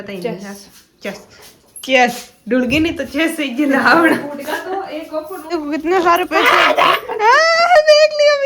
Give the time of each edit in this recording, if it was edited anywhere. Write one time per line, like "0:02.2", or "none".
0:05.5